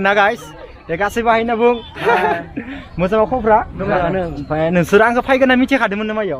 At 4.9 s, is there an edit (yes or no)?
no